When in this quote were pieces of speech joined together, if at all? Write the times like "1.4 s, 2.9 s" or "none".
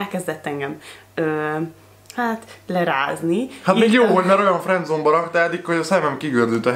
none

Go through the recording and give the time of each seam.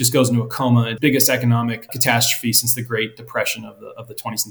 0.9 s, 1.9 s

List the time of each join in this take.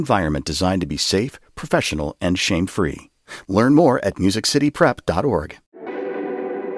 5.8 s

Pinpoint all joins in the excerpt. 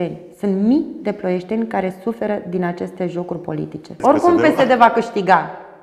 4.0 s

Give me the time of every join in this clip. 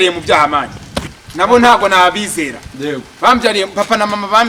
none

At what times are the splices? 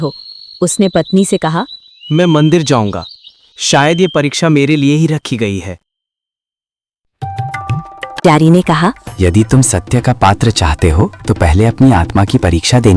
8.2 s

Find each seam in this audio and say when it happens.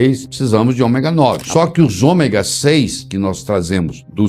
1.4 s

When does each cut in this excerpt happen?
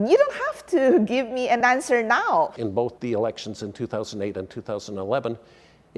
2.5 s

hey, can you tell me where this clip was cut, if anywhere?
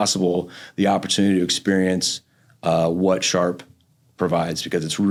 none

